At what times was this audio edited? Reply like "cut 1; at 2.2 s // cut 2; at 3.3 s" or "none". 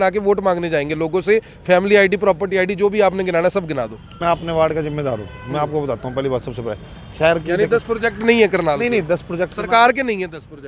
cut 1; at 4.2 s